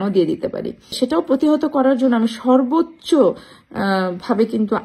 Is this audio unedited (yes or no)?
no